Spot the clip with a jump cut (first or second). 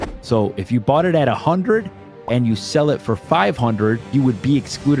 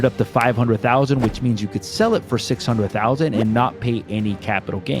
first